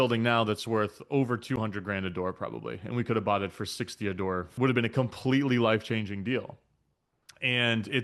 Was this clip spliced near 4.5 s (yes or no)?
yes